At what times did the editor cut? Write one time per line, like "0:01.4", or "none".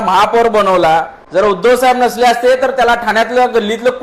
0:01.2